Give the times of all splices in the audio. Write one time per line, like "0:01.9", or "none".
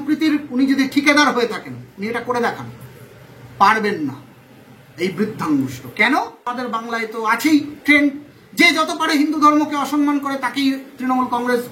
0:06.6